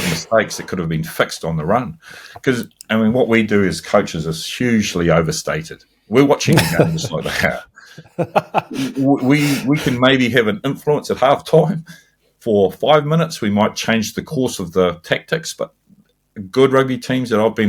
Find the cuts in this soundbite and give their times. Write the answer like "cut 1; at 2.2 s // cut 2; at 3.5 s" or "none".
none